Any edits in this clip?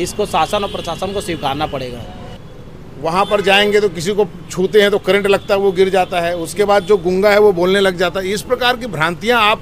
yes; 1 cut; at 2.3 s

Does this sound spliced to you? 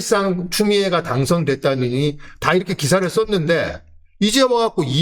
no; 0 cuts

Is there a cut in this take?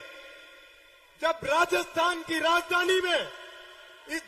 no; 0 cuts

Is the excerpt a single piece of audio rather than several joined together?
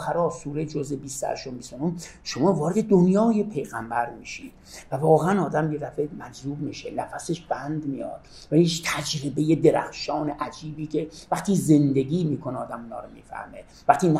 yes; 0 cuts

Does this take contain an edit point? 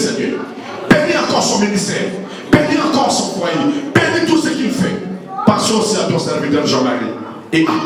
no; 0 cuts

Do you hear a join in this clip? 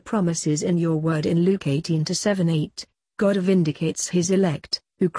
yes; 1 cut; at 1.2 s

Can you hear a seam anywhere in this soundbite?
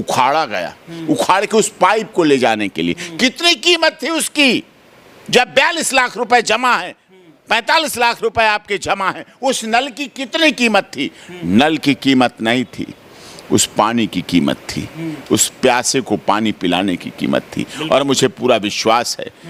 no; 0 cuts

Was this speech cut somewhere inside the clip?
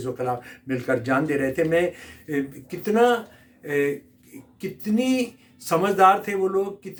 no; 0 cuts

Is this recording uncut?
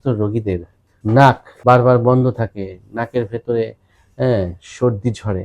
no; 1 cut; at 1.1 s

